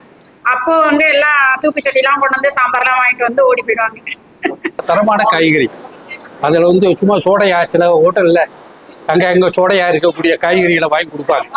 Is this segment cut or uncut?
cut